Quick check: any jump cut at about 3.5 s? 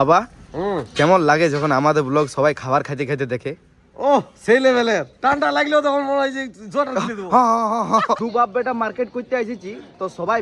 no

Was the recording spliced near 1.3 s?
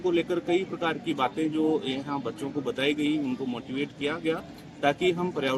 no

